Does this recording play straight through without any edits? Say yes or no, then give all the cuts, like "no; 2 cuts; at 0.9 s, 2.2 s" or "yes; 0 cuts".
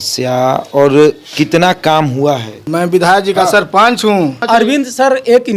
no; 2 cuts; at 2.7 s, 4.4 s